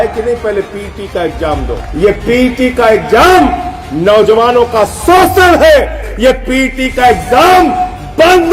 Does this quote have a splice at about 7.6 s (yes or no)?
no